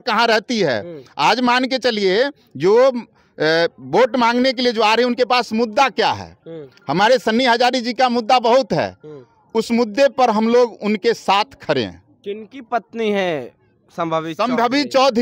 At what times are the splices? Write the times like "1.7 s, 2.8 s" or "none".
none